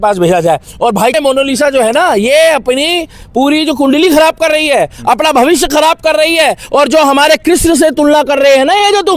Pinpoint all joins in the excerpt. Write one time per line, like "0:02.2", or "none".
0:01.1